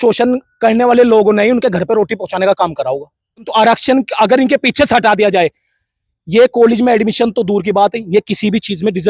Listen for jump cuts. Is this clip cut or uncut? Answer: cut